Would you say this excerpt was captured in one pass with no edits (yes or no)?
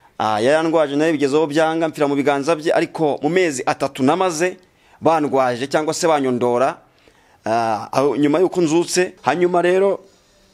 no